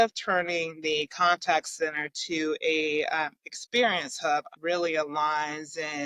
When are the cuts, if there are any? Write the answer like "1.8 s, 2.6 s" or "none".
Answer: 4.5 s